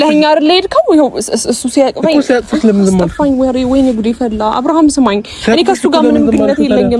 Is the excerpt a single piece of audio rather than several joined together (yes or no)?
yes